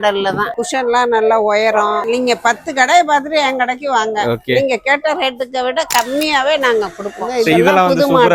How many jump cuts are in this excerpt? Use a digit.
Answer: 2